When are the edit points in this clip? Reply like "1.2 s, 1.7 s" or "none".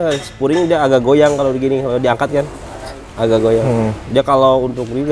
none